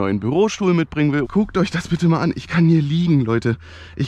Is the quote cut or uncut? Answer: cut